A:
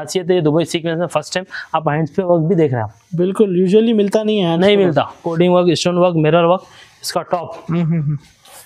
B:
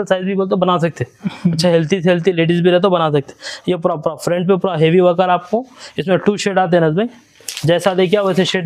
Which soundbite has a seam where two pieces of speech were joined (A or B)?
A